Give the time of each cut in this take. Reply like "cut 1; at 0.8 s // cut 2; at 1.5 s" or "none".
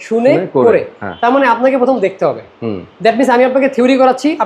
none

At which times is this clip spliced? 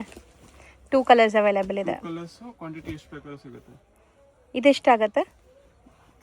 none

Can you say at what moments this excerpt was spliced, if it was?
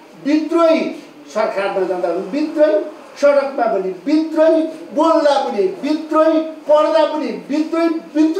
none

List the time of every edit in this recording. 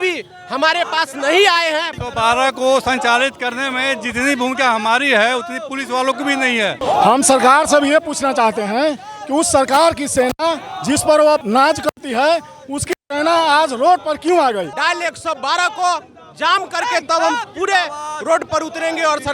cut 1; at 2.0 s // cut 2; at 6.8 s // cut 3; at 11.4 s // cut 4; at 14.7 s

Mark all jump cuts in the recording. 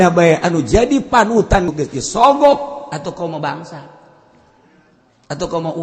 cut 1; at 1.7 s

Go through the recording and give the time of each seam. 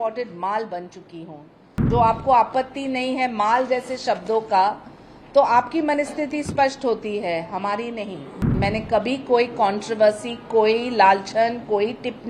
cut 1; at 1.7 s // cut 2; at 8.5 s

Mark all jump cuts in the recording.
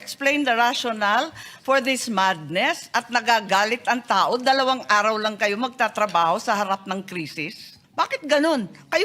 cut 1; at 7.8 s

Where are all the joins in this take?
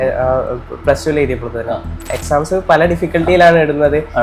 cut 1; at 2.2 s

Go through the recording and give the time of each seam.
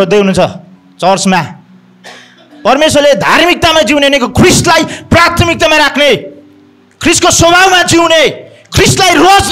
none

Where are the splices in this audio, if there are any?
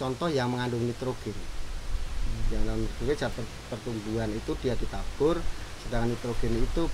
none

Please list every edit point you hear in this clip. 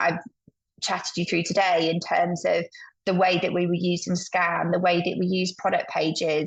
none

